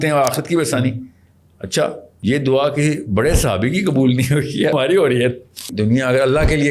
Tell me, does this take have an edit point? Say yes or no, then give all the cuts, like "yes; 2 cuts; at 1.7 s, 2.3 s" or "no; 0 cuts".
yes; 3 cuts; at 2.1 s, 4.7 s, 5.7 s